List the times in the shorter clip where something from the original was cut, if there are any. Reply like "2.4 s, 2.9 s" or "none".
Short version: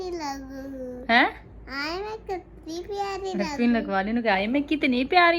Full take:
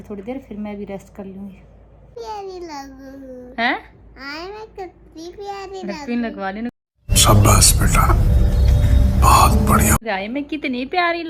4.2 s